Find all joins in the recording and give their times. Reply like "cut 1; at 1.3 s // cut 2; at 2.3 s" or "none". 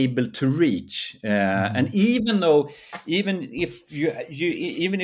none